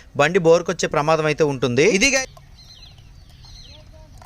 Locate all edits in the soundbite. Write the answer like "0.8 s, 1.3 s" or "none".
2.2 s

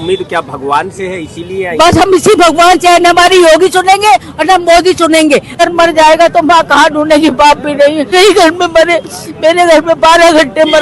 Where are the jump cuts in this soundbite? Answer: 5.6 s, 8.1 s

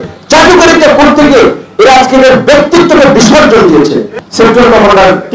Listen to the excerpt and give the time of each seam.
4.1 s

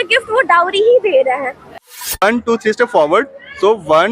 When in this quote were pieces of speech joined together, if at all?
2.1 s

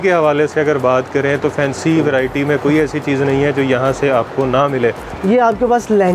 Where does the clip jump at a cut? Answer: 5.1 s

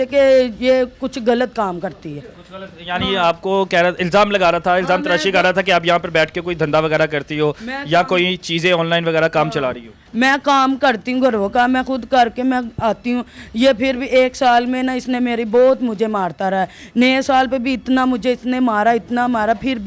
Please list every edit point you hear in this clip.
none

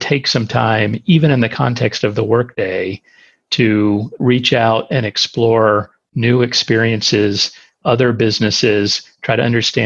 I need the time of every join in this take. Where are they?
2.5 s

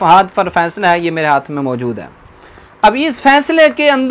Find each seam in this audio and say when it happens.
none

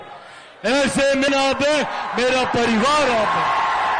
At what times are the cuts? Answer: 1.3 s

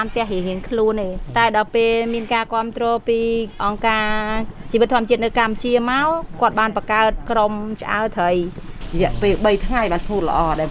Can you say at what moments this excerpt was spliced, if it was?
1.2 s, 3.6 s, 7.2 s, 8.8 s

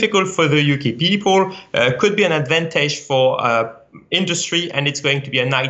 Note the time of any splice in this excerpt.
none

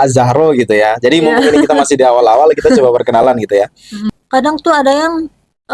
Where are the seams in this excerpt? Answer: 4.0 s

